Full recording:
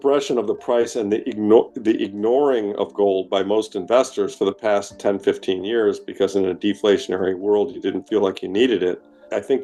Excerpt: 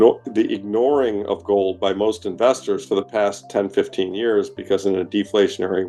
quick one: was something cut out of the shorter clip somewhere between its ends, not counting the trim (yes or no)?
no